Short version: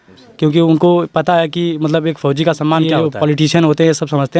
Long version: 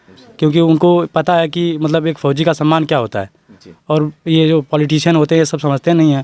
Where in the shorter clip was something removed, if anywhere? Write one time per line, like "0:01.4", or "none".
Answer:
0:02.9